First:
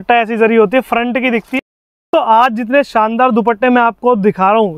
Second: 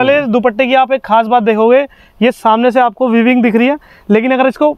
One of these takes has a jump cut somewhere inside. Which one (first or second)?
first